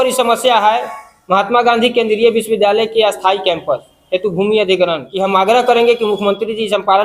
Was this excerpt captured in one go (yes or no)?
no